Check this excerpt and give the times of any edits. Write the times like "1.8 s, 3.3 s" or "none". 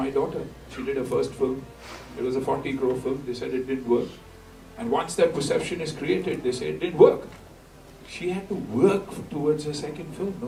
none